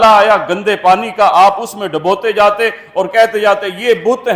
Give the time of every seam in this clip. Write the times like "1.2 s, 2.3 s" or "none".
none